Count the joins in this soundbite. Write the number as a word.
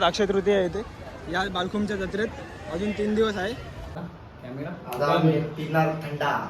one